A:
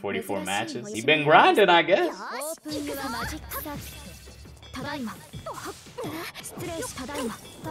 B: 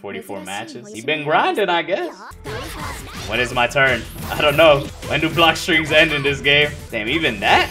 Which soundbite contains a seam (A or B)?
B